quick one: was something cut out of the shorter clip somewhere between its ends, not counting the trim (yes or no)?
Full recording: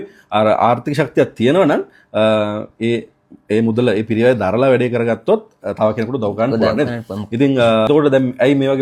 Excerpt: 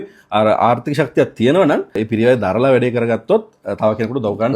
yes